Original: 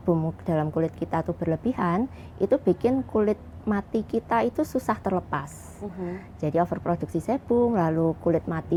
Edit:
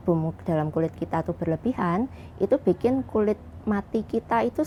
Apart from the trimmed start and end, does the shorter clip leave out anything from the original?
no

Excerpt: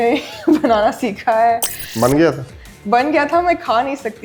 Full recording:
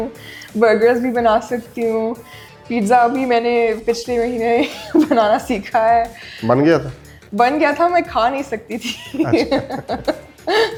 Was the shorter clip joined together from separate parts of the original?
no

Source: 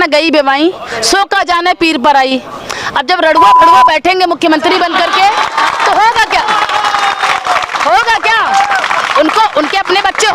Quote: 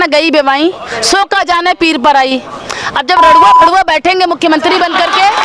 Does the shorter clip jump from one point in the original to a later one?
no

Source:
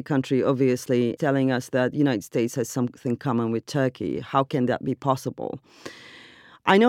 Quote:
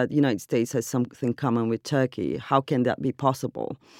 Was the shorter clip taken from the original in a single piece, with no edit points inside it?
yes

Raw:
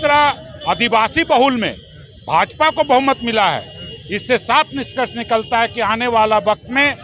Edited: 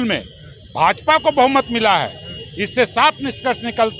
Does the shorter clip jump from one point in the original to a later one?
no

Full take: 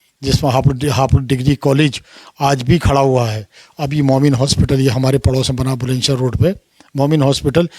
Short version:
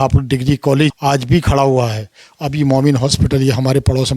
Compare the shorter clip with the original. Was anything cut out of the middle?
yes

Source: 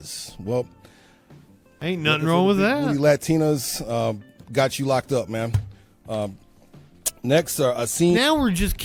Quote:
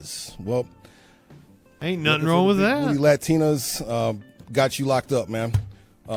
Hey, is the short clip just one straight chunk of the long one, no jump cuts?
yes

